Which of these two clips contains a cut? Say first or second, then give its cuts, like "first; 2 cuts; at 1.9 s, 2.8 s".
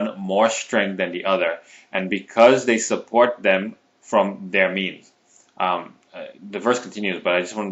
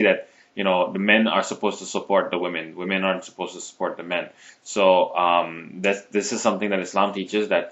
first; 1 cut; at 5.5 s